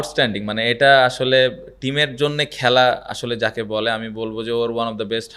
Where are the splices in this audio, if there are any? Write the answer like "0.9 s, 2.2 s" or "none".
none